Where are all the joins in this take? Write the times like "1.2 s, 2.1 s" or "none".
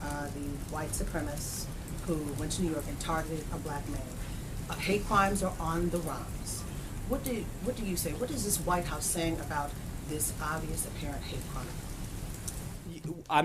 3.5 s